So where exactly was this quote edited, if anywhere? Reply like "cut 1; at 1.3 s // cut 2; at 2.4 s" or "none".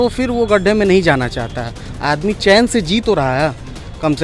none